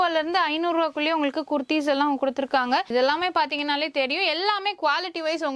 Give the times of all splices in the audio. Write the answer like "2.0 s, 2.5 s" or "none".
2.9 s